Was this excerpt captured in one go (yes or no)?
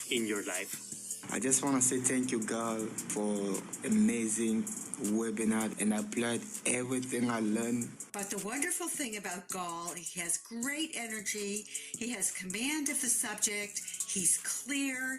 no